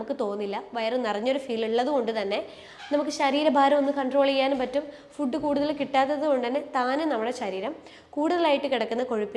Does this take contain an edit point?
no; 0 cuts

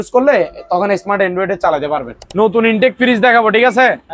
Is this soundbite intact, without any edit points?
no; 1 cut; at 2.2 s

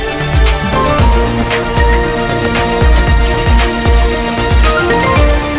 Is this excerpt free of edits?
yes; 0 cuts

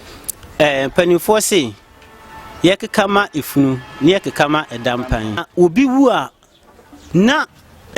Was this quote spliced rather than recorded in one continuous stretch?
yes; 1 cut; at 5.5 s

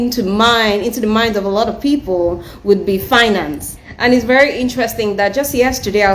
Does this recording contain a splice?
yes; 1 cut; at 3.9 s

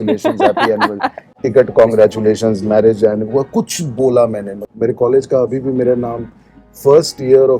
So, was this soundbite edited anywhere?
yes; 1 cut; at 4.7 s

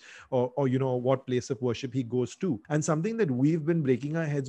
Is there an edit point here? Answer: yes; 1 cut; at 2.6 s

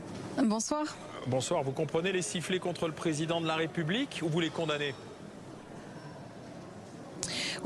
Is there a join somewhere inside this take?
no; 0 cuts

